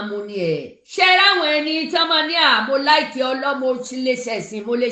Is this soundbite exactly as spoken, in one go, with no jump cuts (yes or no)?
yes